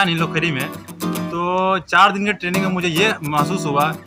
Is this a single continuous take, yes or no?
yes